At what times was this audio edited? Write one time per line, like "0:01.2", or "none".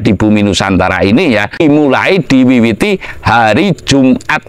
0:01.6